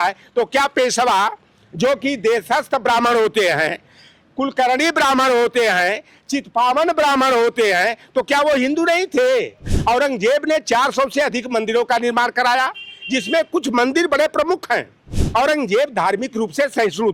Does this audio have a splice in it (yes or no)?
yes